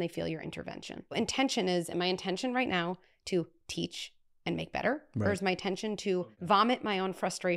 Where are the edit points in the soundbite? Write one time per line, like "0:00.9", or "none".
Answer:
0:01.1
0:06.2